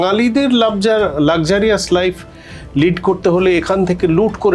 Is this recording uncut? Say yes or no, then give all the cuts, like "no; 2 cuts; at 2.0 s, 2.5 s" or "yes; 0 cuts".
yes; 0 cuts